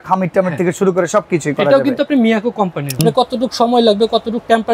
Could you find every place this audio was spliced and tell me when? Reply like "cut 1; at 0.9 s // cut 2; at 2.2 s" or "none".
cut 1; at 3.0 s